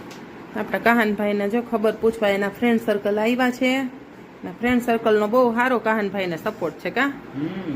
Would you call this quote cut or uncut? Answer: uncut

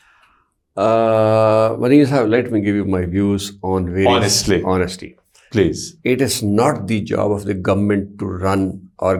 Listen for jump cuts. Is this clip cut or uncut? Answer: uncut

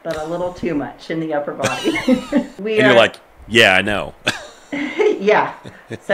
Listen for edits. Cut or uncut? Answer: cut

